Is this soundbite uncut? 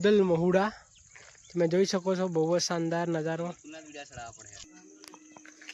no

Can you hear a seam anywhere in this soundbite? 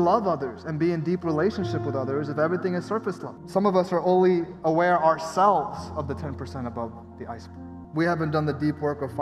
yes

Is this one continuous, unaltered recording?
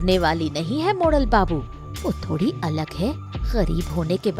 yes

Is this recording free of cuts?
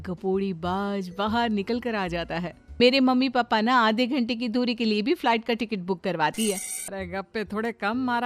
no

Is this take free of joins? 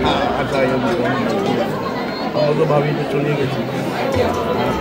yes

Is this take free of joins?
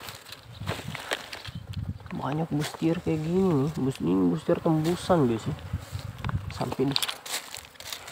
yes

